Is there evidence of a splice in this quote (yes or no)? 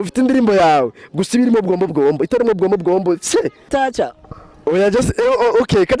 yes